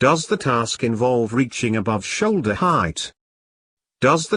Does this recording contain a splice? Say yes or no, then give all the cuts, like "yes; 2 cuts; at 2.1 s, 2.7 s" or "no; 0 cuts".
no; 0 cuts